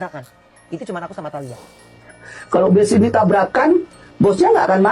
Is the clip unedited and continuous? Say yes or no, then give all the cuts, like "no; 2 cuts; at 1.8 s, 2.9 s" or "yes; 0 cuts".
yes; 0 cuts